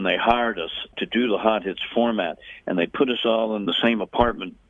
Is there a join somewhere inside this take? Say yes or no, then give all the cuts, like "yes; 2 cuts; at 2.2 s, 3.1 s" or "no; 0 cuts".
yes; 2 cuts; at 0.9 s, 3.6 s